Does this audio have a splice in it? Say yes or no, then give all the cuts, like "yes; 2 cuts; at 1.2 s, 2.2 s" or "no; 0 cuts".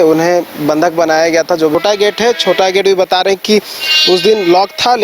yes; 1 cut; at 1.7 s